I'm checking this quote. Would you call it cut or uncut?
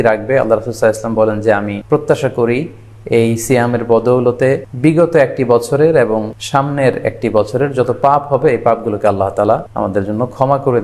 cut